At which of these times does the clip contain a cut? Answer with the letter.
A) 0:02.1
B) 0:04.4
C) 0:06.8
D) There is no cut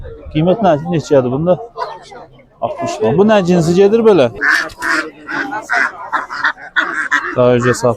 B